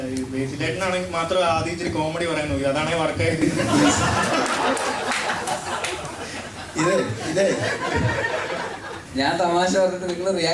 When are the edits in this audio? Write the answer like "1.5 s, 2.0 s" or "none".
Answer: 3.9 s, 9.0 s